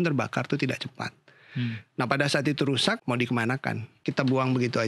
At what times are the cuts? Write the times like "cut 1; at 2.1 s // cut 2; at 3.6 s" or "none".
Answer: cut 1; at 3.0 s // cut 2; at 3.9 s